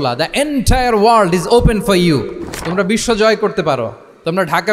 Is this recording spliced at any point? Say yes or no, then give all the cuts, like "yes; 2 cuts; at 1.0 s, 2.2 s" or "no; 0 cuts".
no; 0 cuts